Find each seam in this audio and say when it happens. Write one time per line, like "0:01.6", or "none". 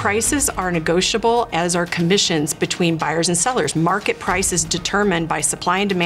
none